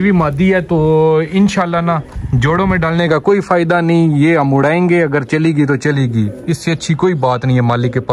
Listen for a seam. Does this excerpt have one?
no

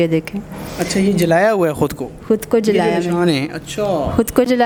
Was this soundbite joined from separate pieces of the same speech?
no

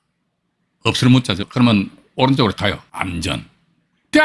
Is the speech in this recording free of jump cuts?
no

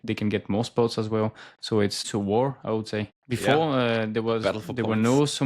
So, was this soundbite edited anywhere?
yes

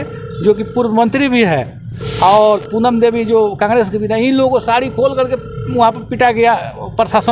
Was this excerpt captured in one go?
yes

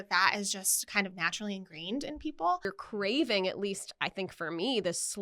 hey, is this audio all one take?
no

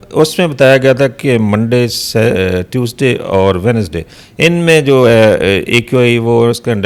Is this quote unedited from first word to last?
yes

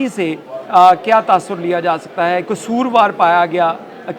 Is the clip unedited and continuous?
no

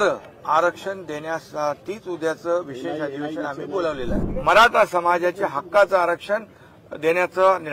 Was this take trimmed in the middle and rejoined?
yes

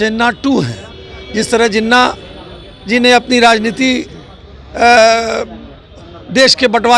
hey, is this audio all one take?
yes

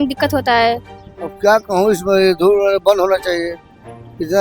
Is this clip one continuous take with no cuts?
no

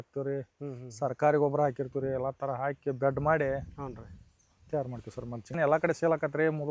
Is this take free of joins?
no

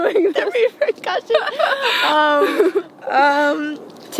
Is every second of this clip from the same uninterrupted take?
yes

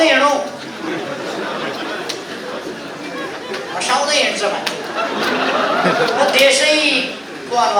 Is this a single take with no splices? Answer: yes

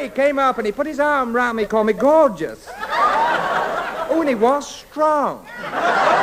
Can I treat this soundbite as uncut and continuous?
yes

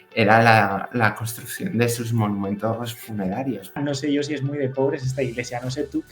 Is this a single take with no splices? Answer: no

